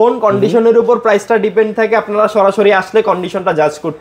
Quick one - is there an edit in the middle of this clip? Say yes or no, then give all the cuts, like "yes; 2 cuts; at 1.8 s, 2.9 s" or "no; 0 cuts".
no; 0 cuts